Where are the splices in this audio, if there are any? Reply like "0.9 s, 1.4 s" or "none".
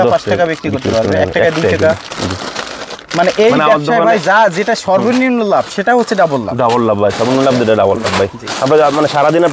none